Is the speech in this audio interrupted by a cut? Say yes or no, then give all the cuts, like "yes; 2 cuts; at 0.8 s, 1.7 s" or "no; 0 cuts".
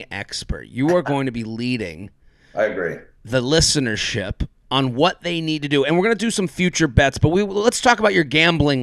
no; 0 cuts